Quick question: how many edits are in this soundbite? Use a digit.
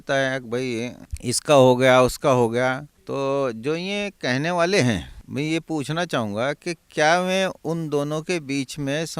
3